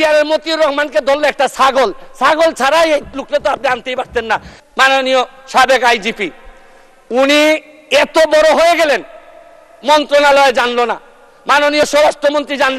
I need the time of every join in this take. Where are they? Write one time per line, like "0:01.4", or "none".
0:04.6